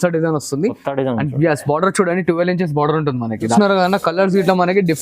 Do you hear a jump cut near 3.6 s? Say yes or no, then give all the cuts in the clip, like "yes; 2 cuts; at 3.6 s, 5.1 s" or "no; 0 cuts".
yes; 1 cut; at 3.6 s